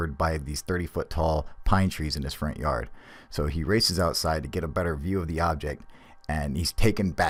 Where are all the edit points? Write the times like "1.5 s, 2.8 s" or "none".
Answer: none